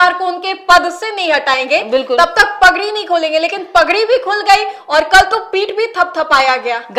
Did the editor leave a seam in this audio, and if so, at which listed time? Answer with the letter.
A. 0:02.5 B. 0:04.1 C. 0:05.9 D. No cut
D